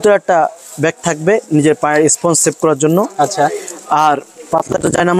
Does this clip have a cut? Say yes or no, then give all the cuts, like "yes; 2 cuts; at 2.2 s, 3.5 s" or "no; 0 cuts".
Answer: no; 0 cuts